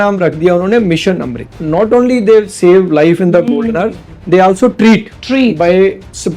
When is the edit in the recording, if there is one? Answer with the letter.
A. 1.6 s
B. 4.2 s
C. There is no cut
A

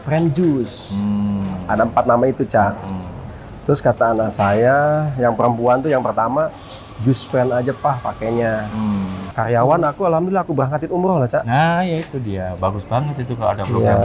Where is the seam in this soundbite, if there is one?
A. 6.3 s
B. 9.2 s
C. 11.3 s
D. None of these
B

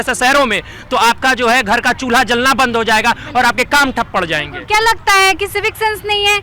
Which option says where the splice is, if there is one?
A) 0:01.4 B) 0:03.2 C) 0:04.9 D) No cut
D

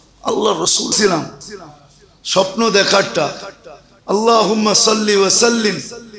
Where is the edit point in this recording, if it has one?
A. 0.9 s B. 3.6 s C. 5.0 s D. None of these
A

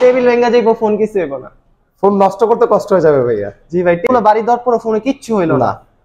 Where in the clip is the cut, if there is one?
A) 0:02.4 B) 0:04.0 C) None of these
B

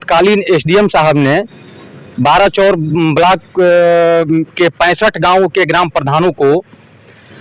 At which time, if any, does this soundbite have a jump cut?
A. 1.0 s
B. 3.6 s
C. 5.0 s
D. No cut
D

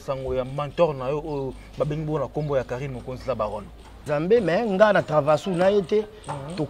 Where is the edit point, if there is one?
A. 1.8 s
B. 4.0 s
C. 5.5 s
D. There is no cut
B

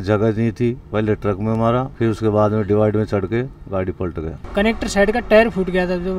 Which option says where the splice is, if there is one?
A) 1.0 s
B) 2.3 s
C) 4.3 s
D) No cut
C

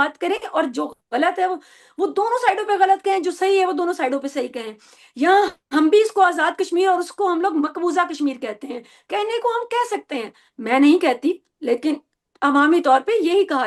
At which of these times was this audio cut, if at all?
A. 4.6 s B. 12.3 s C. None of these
C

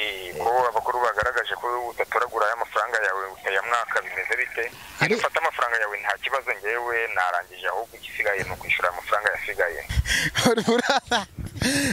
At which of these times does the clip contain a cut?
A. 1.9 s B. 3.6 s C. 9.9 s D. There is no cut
C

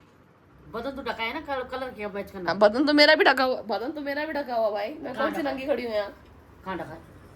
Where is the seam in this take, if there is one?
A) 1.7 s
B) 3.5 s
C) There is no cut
C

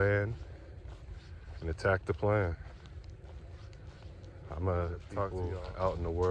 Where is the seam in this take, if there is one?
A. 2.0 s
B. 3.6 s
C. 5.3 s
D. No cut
C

